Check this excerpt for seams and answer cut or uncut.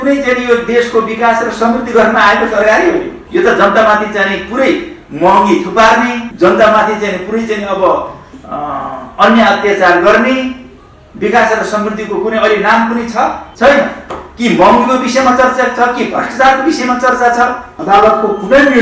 cut